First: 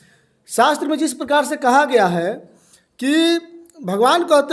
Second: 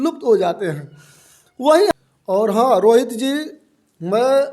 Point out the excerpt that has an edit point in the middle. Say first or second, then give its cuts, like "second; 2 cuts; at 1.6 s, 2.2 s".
second; 1 cut; at 1.9 s